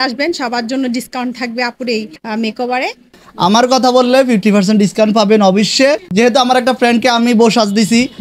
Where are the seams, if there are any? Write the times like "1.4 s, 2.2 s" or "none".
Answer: 2.2 s, 3.2 s, 6.0 s

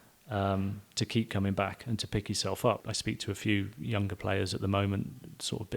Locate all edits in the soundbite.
2.8 s

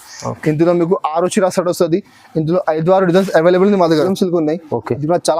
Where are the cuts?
4.1 s

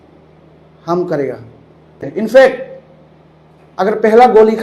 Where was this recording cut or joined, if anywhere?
2.3 s

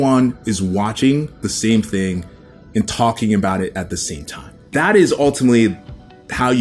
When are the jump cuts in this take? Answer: 4.5 s

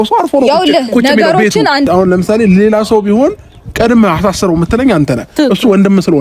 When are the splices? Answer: 1.9 s

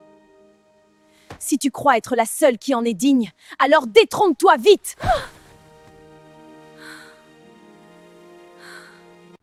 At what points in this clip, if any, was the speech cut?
none

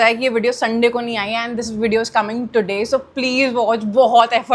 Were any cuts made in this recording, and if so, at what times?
none

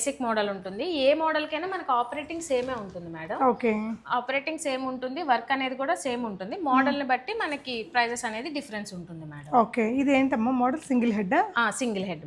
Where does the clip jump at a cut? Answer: none

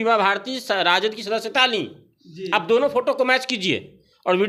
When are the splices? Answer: none

